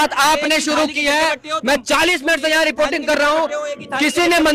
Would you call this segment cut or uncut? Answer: uncut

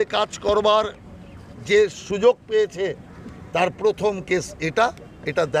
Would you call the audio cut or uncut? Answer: uncut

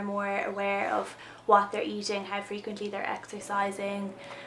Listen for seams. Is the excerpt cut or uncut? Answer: uncut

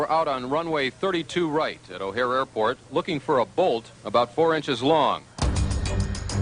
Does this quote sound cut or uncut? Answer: uncut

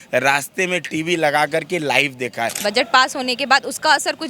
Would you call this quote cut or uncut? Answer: cut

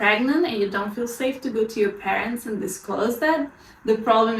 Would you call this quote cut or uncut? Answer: uncut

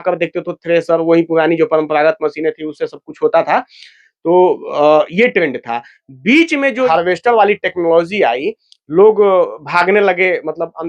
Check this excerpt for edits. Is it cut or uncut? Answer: cut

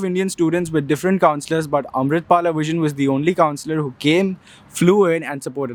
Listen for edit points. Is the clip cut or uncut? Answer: uncut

